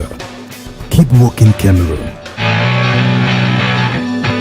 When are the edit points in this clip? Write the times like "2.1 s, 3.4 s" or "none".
2.3 s